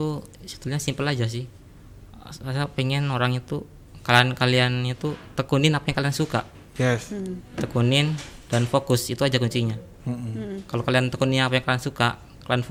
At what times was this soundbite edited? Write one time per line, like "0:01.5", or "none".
none